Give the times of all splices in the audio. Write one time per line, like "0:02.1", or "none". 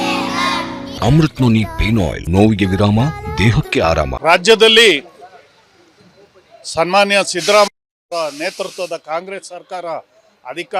0:00.9
0:02.2
0:04.1